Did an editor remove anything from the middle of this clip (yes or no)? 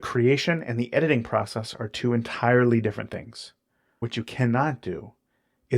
yes